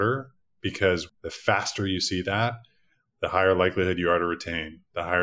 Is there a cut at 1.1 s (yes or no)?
yes